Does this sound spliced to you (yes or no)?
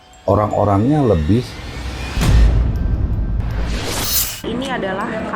yes